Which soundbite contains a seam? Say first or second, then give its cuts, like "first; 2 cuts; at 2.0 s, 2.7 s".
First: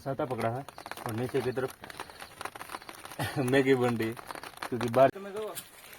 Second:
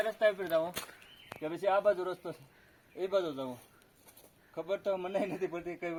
first; 1 cut; at 5.1 s